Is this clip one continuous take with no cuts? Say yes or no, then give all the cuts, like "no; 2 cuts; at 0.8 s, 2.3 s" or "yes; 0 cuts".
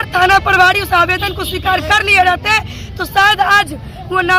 yes; 0 cuts